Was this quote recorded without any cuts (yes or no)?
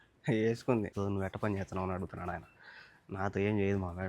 no